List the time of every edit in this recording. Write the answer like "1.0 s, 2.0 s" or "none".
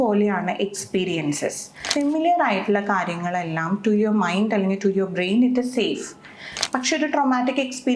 1.9 s, 6.5 s

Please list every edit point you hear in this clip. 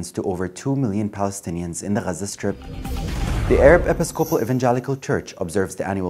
3.4 s

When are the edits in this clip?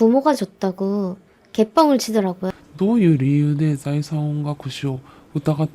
2.4 s

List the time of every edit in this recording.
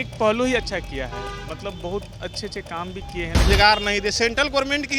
3.5 s

